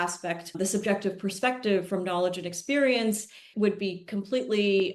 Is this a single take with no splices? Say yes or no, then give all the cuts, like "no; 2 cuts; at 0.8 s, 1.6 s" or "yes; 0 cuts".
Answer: no; 1 cut; at 3.5 s